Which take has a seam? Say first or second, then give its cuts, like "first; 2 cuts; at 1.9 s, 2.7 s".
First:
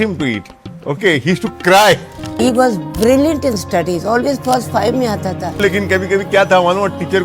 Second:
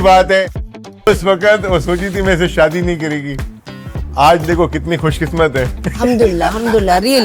first; 2 cuts; at 2.3 s, 5.6 s